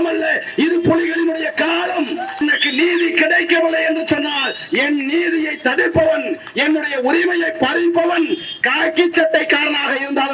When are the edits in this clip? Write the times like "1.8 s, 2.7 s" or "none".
2.4 s